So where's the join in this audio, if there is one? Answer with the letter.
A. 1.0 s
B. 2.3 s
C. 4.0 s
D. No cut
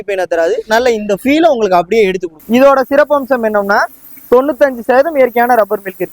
B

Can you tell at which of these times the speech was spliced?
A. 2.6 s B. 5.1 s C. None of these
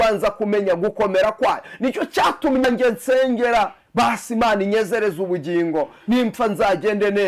A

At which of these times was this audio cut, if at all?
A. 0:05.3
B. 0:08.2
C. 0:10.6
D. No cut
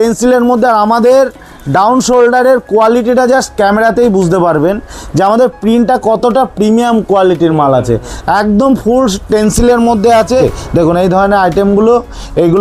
C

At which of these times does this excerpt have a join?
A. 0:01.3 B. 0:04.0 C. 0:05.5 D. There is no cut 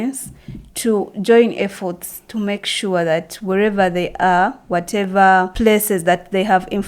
C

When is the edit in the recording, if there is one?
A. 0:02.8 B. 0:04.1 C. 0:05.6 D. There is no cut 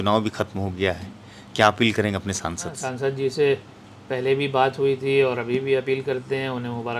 A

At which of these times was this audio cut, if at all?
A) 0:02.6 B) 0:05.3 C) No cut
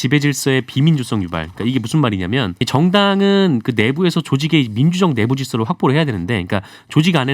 A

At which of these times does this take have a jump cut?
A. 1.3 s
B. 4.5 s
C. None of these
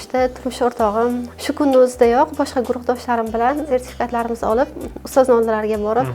A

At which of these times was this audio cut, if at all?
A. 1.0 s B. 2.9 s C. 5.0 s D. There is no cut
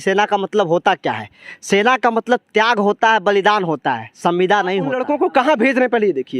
C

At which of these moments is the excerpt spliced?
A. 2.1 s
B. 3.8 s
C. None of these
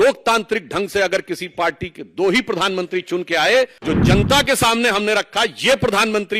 B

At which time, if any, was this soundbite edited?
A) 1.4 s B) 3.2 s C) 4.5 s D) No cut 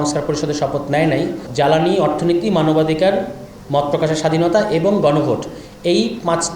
A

